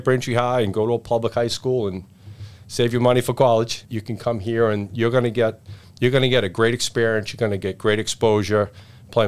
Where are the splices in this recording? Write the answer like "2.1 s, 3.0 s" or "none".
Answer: none